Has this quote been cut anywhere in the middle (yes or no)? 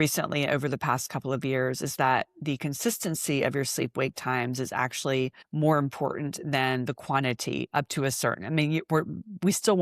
yes